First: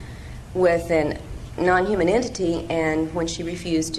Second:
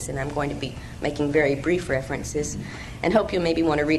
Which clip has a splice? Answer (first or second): second